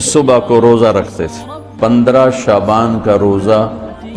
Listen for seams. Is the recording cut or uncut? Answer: cut